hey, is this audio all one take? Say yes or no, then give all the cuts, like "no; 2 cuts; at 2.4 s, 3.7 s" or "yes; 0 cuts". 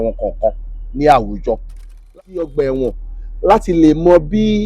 no; 1 cut; at 2.1 s